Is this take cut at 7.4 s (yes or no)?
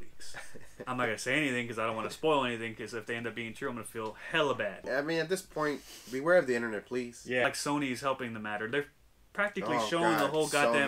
yes